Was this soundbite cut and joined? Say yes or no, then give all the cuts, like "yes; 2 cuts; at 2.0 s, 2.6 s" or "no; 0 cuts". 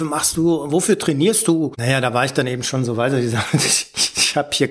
yes; 1 cut; at 1.8 s